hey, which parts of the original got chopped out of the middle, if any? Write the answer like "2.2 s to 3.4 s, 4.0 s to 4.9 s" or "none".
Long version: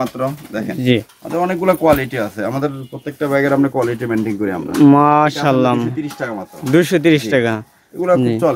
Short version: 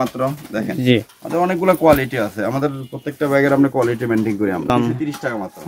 4.7 s to 5.7 s

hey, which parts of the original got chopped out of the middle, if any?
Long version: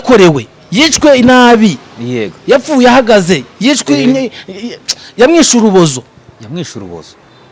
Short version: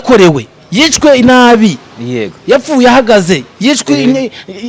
none

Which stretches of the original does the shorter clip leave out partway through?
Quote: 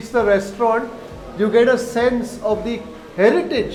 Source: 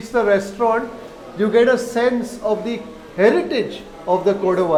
none

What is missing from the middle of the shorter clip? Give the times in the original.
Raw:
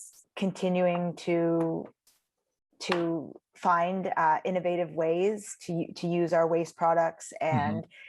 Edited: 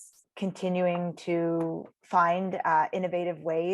1.9 s to 3.4 s

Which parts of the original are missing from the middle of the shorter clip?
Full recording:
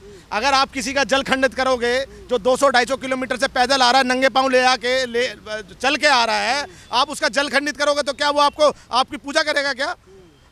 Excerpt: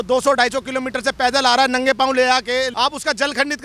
5.1 s to 6.9 s

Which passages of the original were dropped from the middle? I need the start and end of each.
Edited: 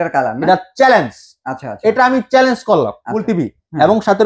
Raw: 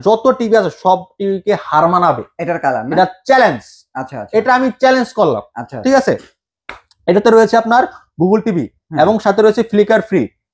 5.7 s to 8.4 s

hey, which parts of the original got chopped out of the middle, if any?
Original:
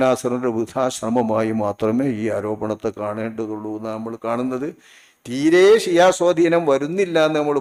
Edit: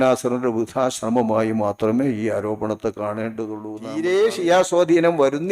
3.8 s to 5.3 s

